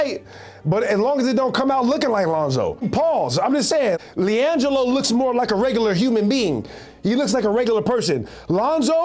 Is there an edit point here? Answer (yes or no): no